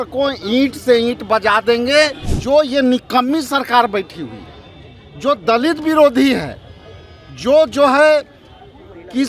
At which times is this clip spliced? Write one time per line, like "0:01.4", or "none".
0:02.3